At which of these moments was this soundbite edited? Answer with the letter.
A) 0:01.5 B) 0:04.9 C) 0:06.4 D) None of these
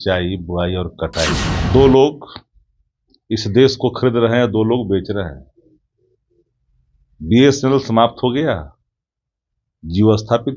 A